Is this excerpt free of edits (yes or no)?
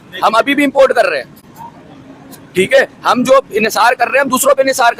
yes